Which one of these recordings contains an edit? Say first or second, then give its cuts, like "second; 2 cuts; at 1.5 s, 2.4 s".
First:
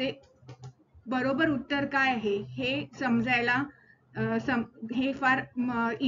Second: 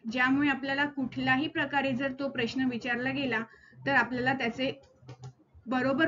second; 1 cut; at 2.8 s